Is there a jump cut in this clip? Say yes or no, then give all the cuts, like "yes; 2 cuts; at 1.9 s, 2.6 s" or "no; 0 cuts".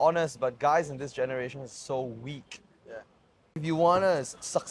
yes; 1 cut; at 3.6 s